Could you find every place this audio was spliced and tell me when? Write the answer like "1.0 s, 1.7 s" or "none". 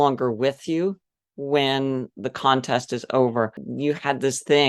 3.6 s